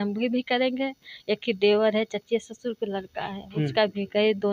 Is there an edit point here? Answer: no; 0 cuts

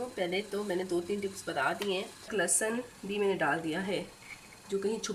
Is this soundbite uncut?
no; 1 cut; at 2.3 s

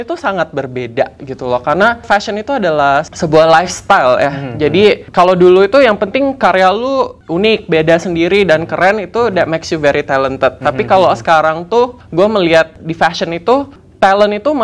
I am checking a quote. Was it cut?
no; 0 cuts

